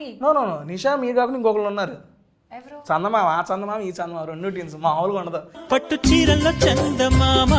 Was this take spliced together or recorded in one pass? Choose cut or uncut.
uncut